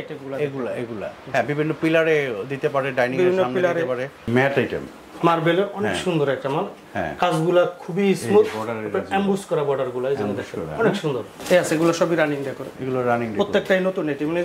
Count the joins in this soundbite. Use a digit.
2